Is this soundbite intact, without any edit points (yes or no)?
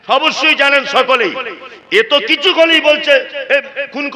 yes